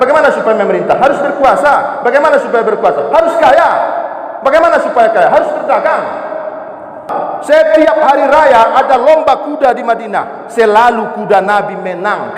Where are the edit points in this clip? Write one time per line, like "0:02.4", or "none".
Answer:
0:07.1